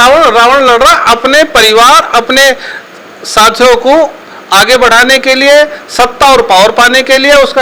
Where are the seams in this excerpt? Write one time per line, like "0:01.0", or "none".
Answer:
none